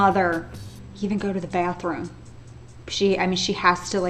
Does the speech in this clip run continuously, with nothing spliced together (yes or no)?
yes